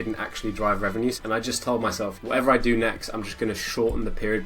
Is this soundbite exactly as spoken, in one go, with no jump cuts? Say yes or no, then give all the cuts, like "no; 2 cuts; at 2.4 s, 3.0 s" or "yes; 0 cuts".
no; 2 cuts; at 1.2 s, 2.2 s